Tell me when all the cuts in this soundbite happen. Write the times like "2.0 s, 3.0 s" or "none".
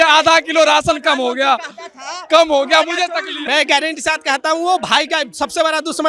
3.4 s